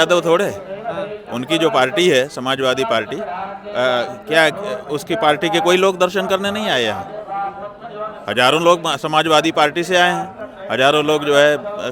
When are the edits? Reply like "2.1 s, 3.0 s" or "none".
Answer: none